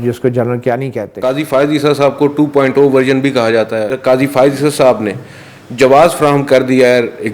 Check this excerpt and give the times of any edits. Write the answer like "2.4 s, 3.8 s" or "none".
1.2 s, 3.9 s